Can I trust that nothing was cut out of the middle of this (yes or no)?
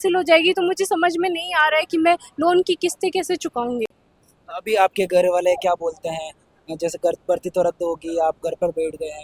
yes